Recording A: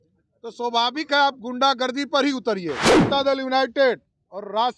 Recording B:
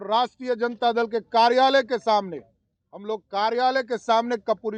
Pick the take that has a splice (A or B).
A